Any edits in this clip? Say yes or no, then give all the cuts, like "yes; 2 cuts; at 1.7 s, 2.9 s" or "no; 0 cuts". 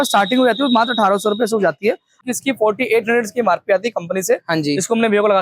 yes; 1 cut; at 2.2 s